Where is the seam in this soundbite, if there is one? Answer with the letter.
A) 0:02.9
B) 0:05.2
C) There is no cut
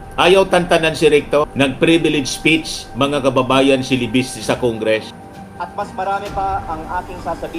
B